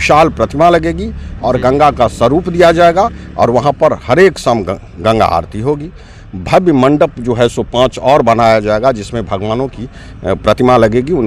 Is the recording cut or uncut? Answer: uncut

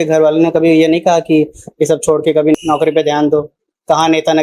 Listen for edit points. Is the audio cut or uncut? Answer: cut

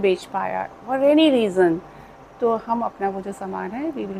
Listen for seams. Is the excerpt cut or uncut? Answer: uncut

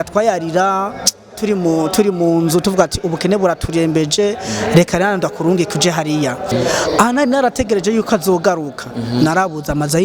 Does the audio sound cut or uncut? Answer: cut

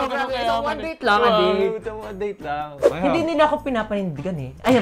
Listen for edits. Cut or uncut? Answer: cut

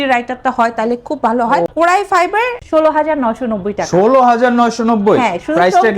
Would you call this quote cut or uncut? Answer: cut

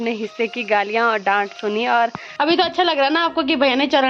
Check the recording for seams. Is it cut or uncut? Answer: cut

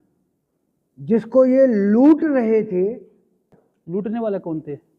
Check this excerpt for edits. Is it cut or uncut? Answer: cut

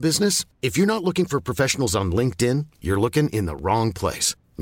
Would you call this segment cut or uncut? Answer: uncut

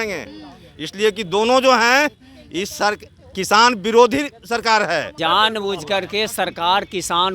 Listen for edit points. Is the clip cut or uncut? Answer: cut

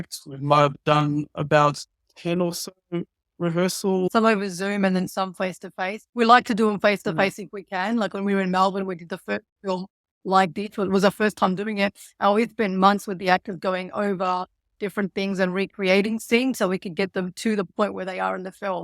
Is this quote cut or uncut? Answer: cut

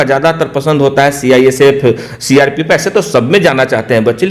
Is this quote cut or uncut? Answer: uncut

